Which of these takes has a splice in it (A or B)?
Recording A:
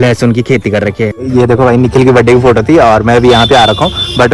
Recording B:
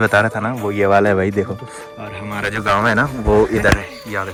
A